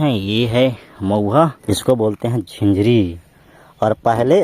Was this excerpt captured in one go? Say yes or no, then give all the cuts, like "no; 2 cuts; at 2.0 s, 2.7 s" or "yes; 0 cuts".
no; 1 cut; at 1.7 s